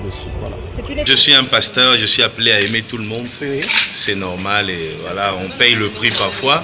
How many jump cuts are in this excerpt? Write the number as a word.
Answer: one